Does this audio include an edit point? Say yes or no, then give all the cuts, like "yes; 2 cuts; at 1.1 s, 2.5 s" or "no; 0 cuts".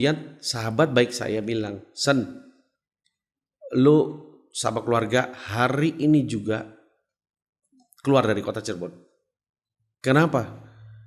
no; 0 cuts